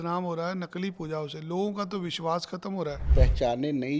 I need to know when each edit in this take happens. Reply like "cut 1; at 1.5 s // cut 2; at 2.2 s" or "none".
cut 1; at 3.0 s